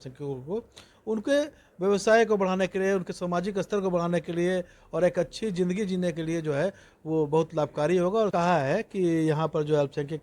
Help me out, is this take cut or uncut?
cut